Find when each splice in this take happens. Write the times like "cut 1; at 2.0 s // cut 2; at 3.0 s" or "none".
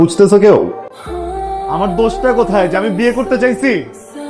none

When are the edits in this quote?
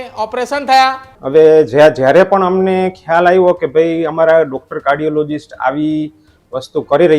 cut 1; at 1.1 s

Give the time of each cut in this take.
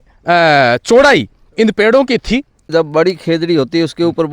cut 1; at 2.7 s

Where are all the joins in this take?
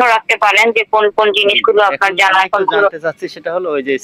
none

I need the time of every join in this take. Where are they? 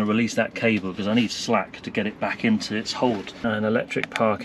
cut 1; at 3.3 s

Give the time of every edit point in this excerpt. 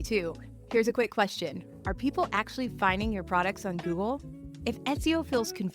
none

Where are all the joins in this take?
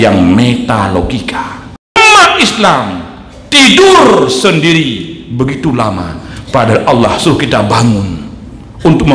cut 1; at 2.0 s

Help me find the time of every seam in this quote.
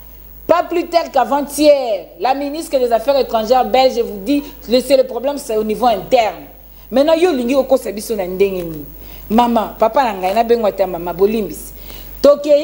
none

